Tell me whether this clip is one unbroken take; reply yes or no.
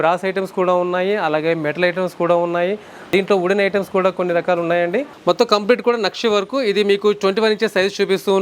no